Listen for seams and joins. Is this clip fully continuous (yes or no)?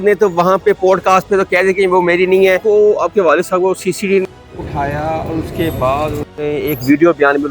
no